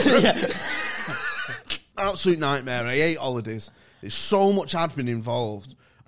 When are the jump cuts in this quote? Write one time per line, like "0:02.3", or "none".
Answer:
0:01.8

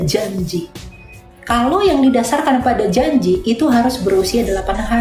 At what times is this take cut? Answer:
none

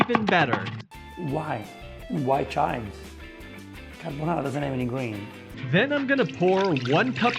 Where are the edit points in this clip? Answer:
0:05.4

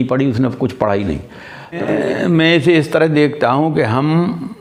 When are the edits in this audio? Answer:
0:01.7

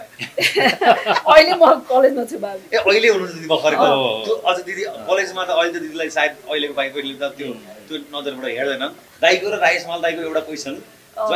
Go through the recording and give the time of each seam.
0:09.0

